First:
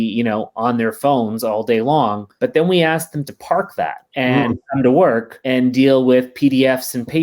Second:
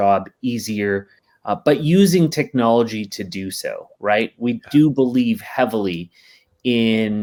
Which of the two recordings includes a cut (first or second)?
first